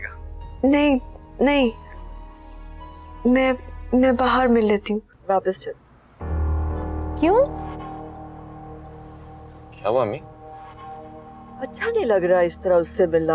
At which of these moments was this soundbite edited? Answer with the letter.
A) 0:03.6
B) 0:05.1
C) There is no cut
B